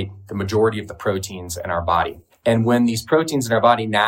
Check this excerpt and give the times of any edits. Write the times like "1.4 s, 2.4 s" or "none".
2.2 s